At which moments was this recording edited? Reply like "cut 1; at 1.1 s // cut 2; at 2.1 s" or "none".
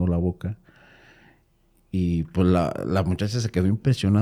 none